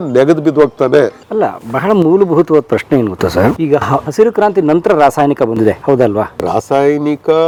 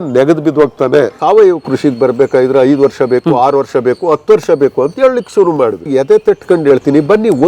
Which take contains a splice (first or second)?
second